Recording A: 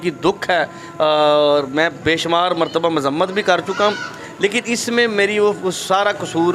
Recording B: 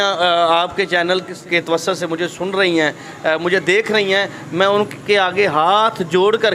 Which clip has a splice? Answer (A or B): B